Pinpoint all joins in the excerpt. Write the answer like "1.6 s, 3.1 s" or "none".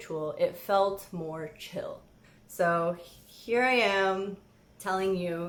none